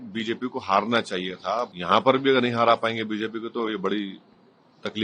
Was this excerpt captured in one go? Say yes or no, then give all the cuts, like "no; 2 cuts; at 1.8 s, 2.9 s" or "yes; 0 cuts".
no; 1 cut; at 1.7 s